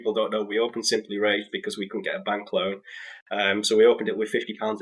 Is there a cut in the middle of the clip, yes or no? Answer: no